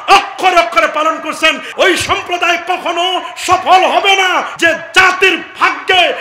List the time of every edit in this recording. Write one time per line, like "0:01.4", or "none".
0:01.7
0:04.5